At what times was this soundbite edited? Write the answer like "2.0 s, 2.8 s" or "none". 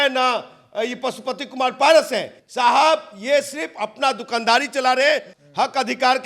2.4 s, 5.3 s